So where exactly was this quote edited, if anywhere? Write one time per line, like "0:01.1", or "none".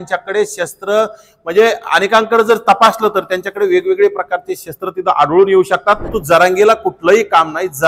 0:06.1